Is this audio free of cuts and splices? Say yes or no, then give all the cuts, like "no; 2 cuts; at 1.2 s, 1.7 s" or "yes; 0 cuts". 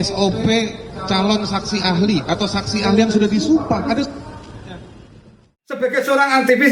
no; 1 cut; at 5.8 s